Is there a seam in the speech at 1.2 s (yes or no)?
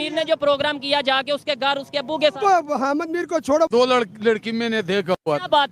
no